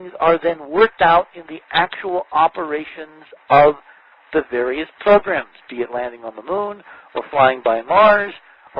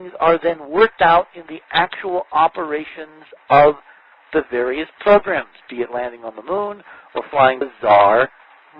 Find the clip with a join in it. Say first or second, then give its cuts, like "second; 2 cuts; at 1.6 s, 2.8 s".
first; 1 cut; at 7.6 s